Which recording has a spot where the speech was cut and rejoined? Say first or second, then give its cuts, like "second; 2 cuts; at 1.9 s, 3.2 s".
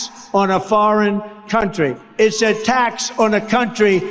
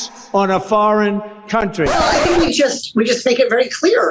second; 1 cut; at 1.9 s